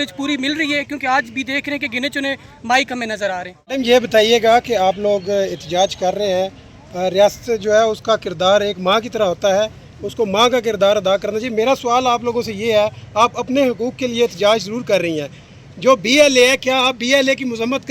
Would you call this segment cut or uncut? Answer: cut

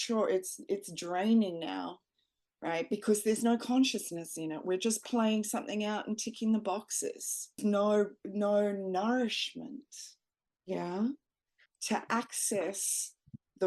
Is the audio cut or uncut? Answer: cut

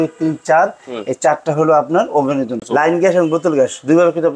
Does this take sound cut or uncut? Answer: cut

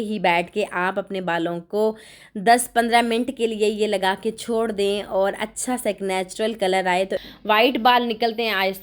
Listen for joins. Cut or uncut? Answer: cut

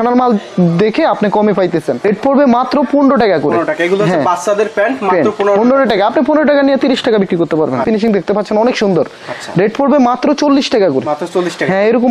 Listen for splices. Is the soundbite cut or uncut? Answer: cut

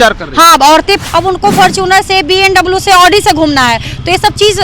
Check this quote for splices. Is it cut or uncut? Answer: cut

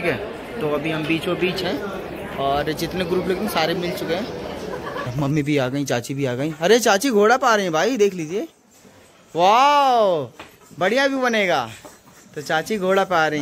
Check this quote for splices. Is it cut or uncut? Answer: cut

